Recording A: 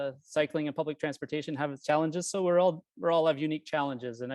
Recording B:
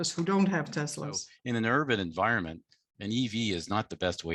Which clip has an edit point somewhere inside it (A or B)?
B